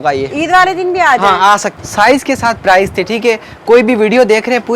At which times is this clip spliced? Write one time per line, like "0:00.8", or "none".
0:01.8